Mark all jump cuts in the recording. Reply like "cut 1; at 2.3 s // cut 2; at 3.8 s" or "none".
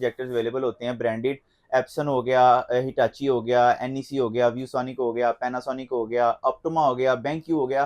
none